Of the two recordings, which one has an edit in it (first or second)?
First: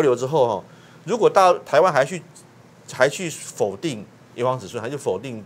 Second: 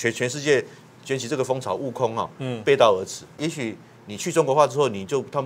second